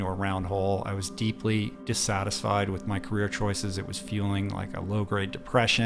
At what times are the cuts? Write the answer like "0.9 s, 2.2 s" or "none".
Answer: 1.8 s